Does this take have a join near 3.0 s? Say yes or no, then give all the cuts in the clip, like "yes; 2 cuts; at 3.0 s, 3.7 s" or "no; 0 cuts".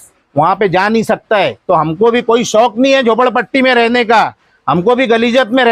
no; 1 cut; at 1.6 s